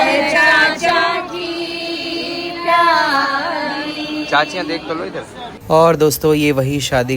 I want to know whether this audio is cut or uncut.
cut